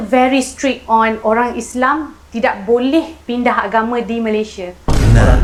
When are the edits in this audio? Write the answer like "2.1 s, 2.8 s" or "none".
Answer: none